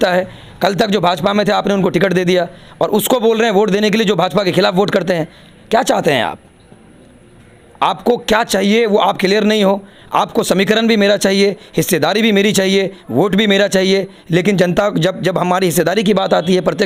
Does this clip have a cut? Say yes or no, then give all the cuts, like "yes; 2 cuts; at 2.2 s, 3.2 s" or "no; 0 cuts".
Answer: no; 0 cuts